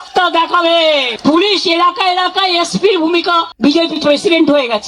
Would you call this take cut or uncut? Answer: cut